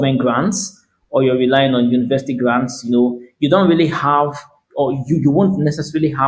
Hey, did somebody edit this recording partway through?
no; 0 cuts

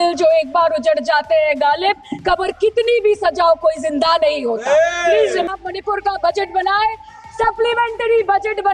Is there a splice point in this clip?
yes; 1 cut; at 5.5 s

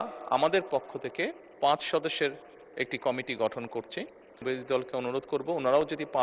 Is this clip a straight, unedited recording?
no; 1 cut; at 4.4 s

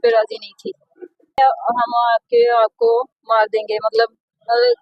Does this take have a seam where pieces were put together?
yes; 1 cut; at 1.4 s

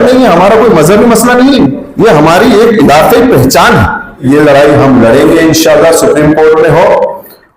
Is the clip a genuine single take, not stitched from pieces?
no; 1 cut; at 4.2 s

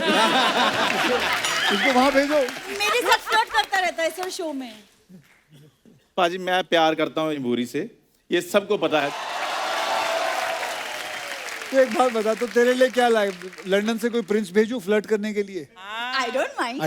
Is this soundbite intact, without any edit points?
yes; 0 cuts

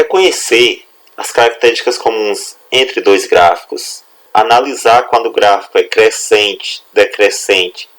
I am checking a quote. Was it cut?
yes; 1 cut; at 4.2 s

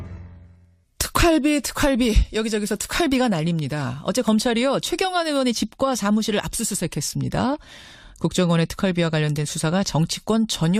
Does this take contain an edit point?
no; 0 cuts

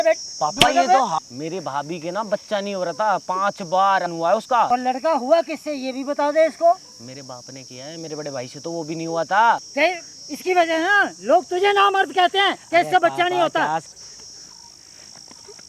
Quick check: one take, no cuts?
no; 4 cuts; at 1.2 s, 4.7 s, 9.7 s, 14.2 s

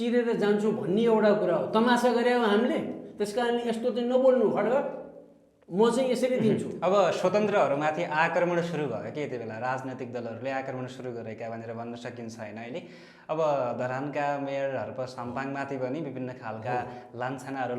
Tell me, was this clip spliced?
no; 0 cuts

